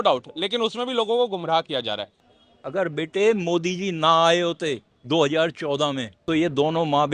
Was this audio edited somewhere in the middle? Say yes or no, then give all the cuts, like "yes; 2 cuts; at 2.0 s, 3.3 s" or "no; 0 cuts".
yes; 3 cuts; at 2.1 s, 4.9 s, 6.1 s